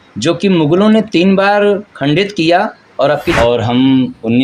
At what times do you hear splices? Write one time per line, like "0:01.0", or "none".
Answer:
0:03.4